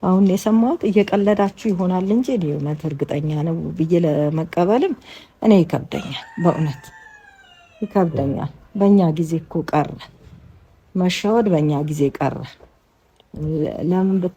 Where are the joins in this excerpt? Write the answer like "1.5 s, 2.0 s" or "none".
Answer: none

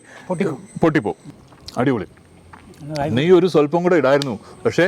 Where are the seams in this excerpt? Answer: 1.2 s

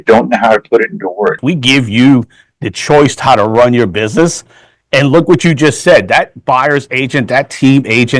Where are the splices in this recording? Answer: 1.4 s

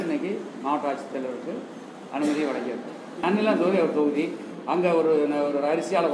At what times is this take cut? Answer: 3.1 s

